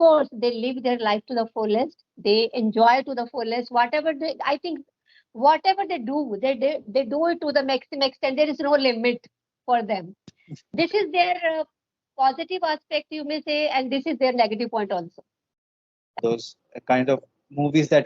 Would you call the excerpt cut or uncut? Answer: cut